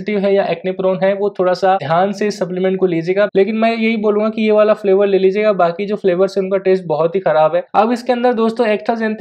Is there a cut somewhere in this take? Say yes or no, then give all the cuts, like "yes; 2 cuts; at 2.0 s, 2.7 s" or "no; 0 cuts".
yes; 3 cuts; at 1.8 s, 3.3 s, 7.7 s